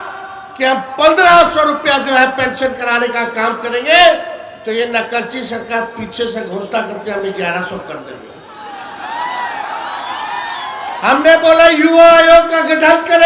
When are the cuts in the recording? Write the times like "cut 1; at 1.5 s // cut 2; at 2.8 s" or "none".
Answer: none